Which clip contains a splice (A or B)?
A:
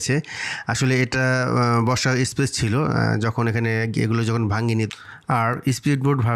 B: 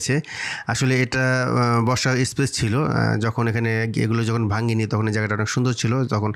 A